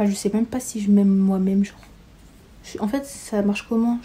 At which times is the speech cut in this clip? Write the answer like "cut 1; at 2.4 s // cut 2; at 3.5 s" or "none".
none